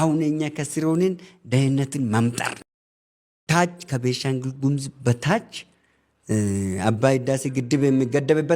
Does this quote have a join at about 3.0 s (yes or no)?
yes